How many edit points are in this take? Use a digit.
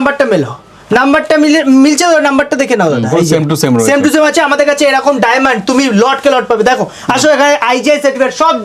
0